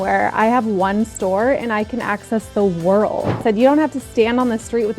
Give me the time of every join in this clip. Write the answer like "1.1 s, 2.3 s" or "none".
3.4 s